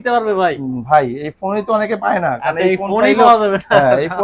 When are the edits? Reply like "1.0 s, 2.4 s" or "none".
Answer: none

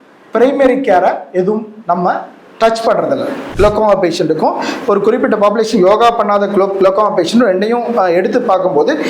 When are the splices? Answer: 3.6 s

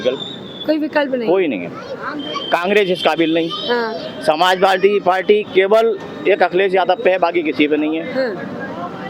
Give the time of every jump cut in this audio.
none

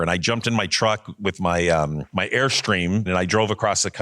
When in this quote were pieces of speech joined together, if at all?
2.0 s, 3.1 s

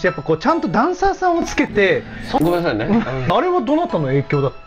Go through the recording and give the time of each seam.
2.4 s, 3.3 s

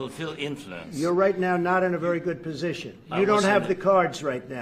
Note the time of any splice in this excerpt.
3.0 s

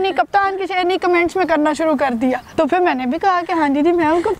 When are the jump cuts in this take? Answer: 2.4 s

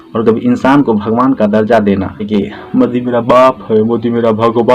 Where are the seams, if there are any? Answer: 2.3 s

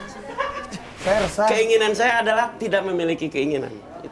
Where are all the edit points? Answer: 1.0 s

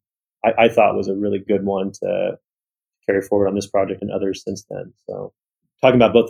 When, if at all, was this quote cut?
1.4 s, 4.0 s

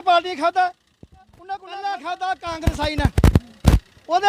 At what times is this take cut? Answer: 1.3 s

